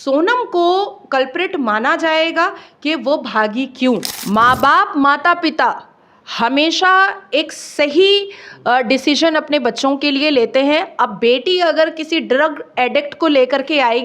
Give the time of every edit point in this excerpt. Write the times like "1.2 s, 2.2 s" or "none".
4.1 s